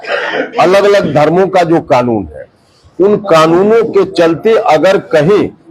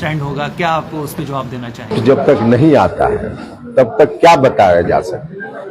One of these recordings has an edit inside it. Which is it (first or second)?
second